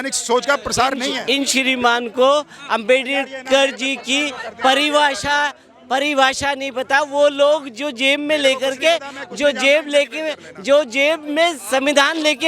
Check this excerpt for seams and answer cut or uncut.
cut